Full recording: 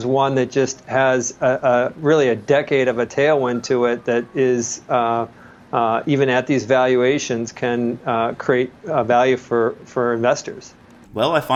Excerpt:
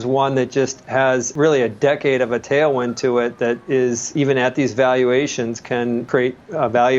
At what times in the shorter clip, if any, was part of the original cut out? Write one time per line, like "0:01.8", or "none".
0:01.3
0:04.1
0:06.1